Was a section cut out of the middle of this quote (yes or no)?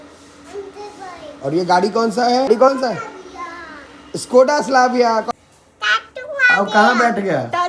yes